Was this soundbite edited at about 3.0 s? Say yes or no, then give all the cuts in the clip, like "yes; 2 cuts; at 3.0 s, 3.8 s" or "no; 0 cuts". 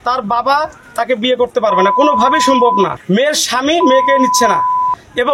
yes; 1 cut; at 3.0 s